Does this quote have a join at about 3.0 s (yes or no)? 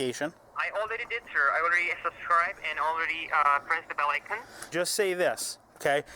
no